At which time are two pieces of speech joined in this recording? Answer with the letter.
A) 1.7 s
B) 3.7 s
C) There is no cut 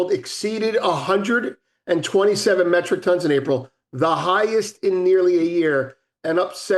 C